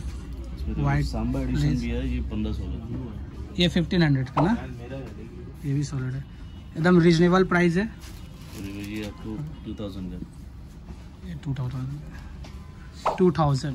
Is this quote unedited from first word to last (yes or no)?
yes